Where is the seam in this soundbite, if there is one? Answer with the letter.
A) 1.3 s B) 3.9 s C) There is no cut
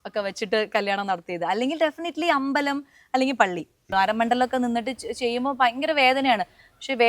B